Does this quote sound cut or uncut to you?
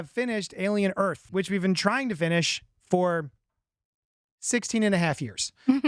cut